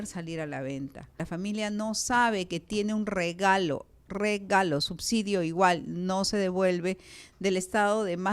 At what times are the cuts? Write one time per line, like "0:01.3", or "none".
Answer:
0:01.2

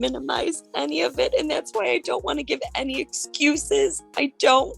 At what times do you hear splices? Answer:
none

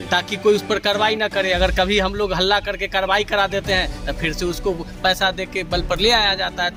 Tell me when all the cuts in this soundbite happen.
none

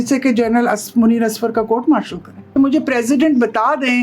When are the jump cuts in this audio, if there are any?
0:02.5

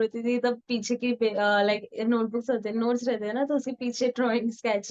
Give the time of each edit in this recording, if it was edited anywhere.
none

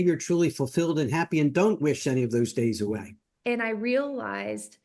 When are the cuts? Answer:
0:03.2

